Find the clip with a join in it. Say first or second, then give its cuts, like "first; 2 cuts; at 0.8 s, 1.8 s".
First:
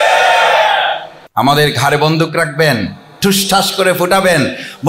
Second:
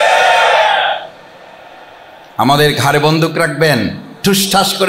first; 1 cut; at 1.1 s